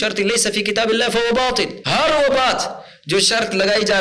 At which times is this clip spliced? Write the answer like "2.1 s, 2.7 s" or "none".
1.8 s